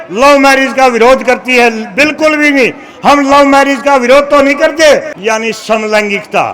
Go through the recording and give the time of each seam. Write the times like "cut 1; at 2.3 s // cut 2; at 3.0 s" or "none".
cut 1; at 5.1 s